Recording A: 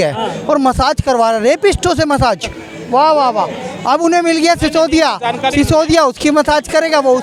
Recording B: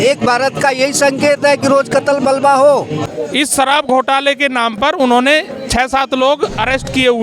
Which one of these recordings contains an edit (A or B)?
B